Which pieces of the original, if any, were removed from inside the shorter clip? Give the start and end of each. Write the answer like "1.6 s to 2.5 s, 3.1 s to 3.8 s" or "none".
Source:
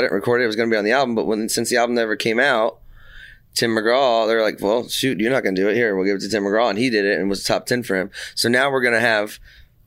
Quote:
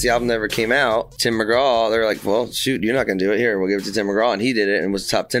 2.8 s to 3.5 s